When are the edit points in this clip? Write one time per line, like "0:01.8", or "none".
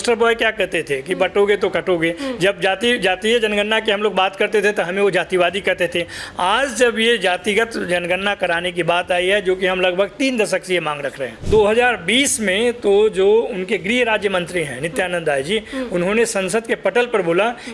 0:11.4